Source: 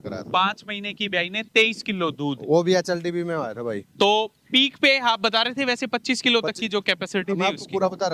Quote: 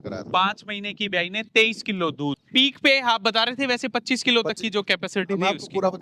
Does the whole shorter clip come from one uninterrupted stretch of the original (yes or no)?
no